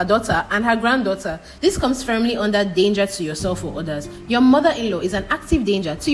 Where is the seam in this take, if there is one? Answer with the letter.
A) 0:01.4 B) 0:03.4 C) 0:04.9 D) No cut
A